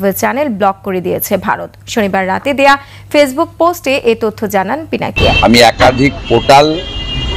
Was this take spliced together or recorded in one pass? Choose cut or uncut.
cut